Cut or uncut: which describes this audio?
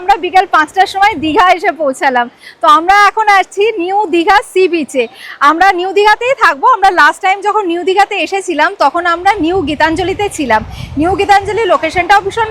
uncut